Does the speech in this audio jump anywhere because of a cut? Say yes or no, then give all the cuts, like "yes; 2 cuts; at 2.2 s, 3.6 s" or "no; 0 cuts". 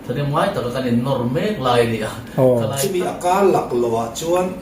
yes; 1 cut; at 2.8 s